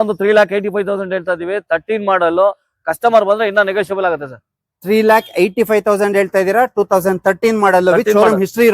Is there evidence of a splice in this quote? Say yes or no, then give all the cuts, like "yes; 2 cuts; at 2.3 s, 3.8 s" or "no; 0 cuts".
no; 0 cuts